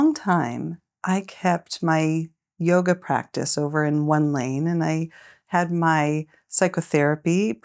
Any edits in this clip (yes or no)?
no